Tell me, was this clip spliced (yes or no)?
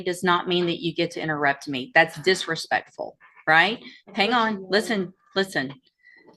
no